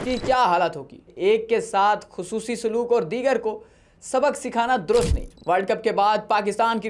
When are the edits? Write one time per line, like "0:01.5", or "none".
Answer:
0:01.1
0:05.3